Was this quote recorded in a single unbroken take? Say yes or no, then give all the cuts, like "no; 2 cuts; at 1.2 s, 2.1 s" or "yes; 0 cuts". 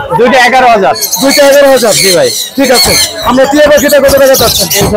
yes; 0 cuts